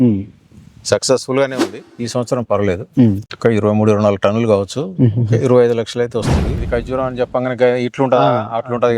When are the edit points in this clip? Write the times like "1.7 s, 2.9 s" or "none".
1.8 s, 6.6 s

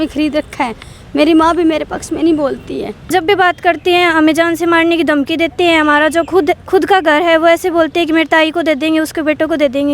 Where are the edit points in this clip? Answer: 3.1 s

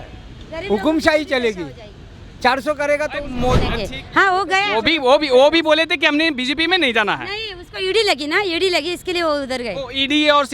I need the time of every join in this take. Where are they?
3.7 s

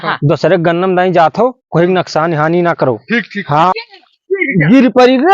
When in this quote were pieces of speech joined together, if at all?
3.8 s

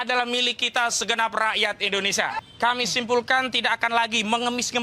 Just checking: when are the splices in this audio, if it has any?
2.4 s

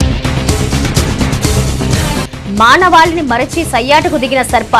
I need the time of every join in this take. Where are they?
2.2 s

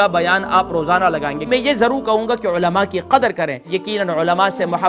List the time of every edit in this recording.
1.4 s, 3.8 s

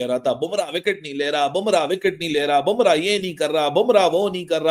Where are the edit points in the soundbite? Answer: none

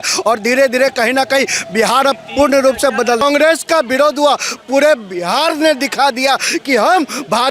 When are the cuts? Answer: 3.2 s

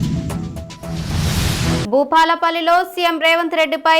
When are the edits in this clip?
none

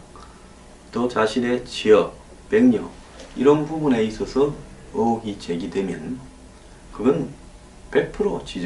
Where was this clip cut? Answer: 2.8 s

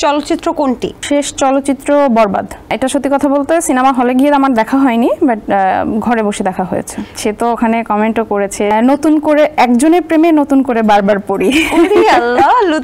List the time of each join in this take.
1.0 s, 2.7 s, 7.1 s, 8.7 s

